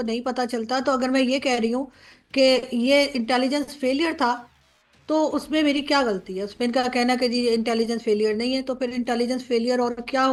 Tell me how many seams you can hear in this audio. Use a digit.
0